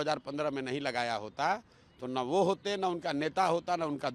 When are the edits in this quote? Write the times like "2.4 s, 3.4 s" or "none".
none